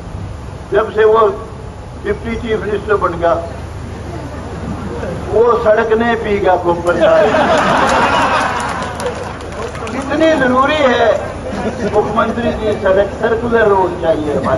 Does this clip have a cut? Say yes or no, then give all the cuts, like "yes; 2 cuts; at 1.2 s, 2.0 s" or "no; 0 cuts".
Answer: no; 0 cuts